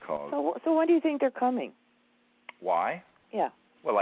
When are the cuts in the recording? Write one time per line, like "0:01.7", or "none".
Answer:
0:01.2